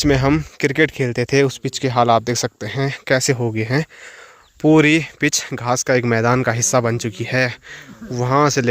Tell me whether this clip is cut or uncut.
uncut